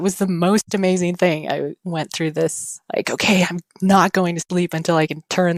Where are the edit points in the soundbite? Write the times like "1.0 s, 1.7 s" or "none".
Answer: none